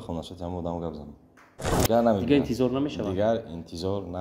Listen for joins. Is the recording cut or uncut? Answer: cut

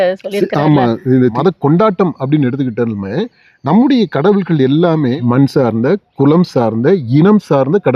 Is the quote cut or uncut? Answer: cut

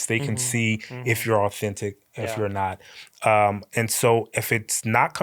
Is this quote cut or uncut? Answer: uncut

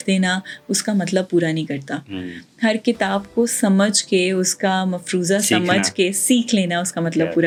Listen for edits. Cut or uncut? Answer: uncut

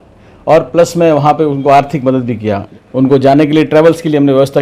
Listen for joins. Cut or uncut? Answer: cut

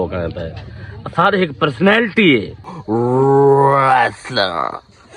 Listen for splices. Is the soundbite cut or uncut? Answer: cut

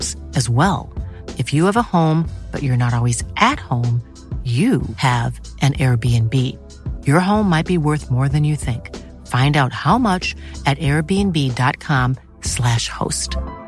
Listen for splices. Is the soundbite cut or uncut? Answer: uncut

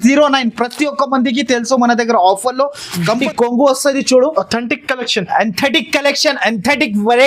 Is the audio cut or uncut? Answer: cut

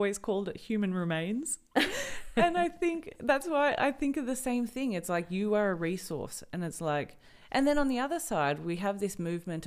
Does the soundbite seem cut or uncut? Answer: uncut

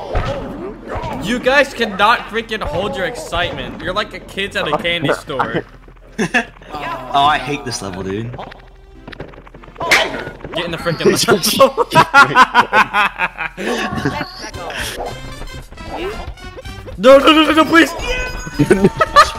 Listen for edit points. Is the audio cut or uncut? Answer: cut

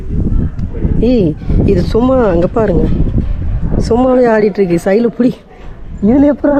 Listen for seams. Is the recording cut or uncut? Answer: uncut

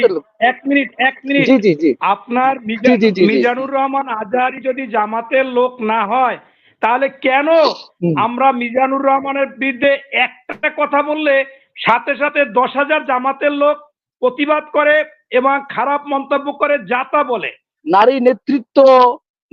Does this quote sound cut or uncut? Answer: cut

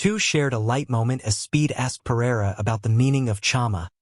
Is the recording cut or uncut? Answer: uncut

